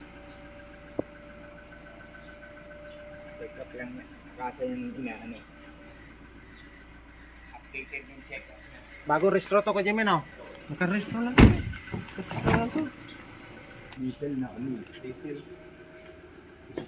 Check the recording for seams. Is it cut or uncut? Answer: cut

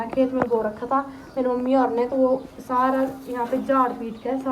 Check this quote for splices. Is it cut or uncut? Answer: uncut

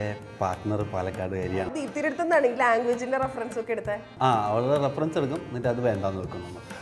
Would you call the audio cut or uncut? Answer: cut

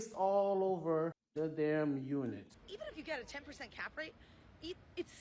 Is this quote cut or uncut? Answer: cut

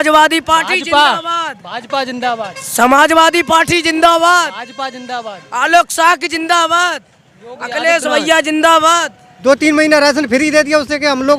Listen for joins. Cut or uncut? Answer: cut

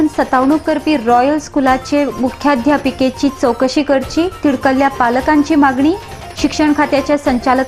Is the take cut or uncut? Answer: uncut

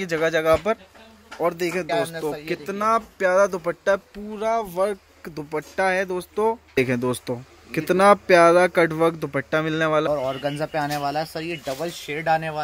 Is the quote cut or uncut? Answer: cut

